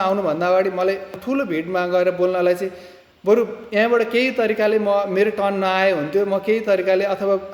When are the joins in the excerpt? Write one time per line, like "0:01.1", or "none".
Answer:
0:01.2